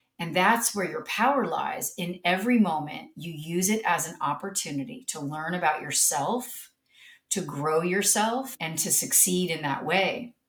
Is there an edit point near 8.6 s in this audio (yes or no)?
yes